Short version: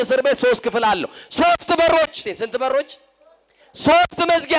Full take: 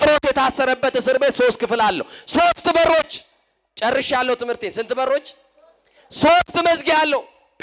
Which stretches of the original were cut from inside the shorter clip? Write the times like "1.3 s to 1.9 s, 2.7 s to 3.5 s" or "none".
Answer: 3.3 s to 4.7 s